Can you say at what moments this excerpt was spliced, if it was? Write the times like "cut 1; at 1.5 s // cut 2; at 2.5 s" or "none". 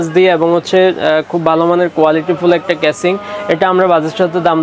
none